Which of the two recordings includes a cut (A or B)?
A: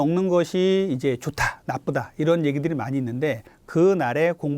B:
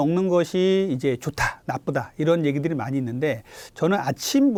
A